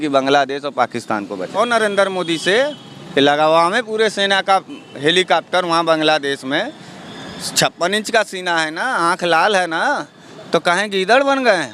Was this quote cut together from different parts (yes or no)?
yes